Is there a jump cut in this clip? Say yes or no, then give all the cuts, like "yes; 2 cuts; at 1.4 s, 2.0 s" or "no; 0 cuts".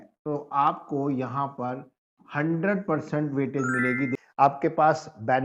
yes; 1 cut; at 4.2 s